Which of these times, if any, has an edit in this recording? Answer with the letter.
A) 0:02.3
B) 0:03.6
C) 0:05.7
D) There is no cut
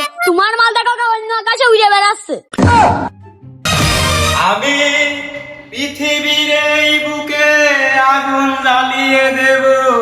B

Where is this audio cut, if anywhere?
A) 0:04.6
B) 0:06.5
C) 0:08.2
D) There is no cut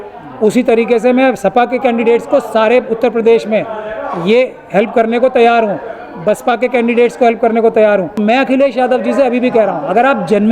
C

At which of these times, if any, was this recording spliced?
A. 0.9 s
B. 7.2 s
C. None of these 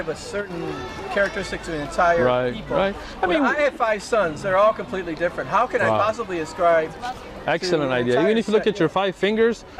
C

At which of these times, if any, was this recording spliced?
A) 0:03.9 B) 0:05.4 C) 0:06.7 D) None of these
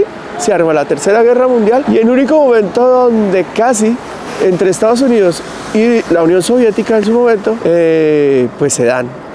D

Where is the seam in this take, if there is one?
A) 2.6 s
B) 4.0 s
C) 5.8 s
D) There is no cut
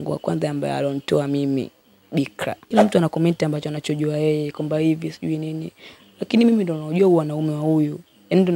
A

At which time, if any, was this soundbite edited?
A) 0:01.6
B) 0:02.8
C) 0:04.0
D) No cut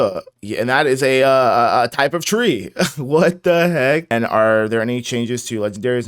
C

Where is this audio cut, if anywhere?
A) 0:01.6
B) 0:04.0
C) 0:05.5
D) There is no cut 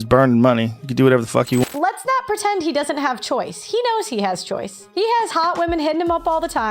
A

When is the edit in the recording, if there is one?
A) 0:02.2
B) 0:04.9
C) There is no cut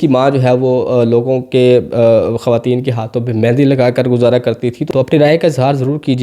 B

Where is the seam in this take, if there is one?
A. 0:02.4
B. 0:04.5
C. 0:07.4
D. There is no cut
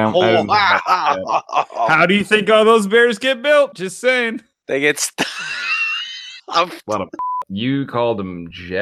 C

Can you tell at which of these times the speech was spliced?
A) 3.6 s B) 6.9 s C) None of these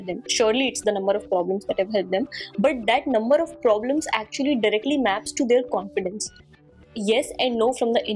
B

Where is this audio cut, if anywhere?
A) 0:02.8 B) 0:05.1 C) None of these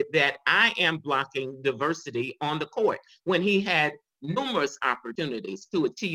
B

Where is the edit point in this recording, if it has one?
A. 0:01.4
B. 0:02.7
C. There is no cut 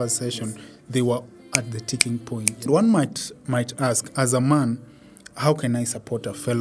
B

